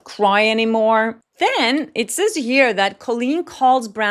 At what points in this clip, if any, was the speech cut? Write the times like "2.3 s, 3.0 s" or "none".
1.2 s